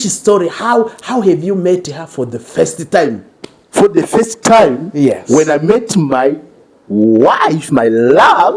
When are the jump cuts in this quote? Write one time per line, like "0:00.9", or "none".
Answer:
none